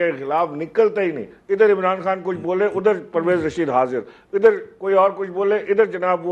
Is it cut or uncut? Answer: uncut